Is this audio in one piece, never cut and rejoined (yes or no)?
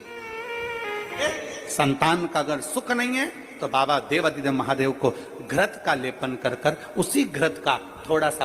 no